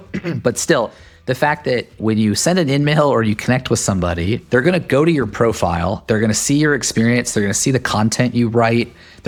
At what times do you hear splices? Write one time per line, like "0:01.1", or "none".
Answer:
none